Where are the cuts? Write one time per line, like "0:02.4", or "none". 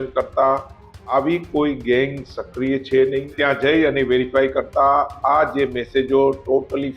0:03.3